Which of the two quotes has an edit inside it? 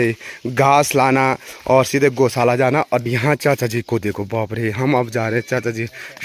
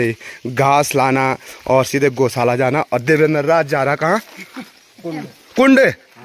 first; 1 cut; at 3.0 s

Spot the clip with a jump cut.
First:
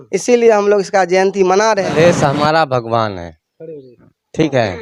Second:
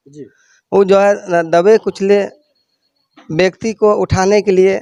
first; 1 cut; at 1.9 s

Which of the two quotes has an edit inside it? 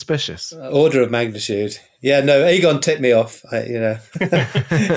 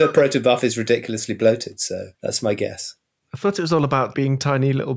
second; 2 cuts; at 2.1 s, 4.1 s

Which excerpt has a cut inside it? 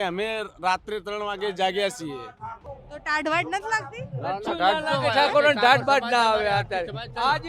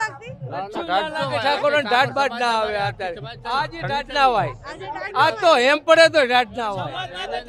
first; 1 cut; at 2.6 s

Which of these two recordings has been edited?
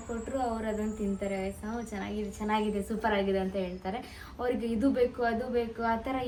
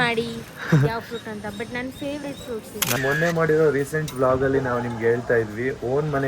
second; 1 cut; at 2.9 s

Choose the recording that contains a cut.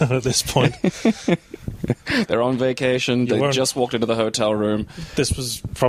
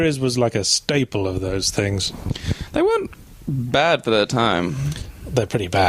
second; 1 cut; at 2.8 s

